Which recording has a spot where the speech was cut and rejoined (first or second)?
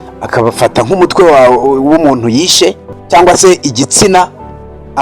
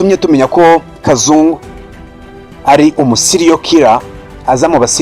first